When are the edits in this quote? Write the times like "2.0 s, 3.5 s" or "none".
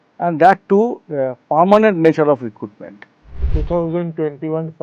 3.3 s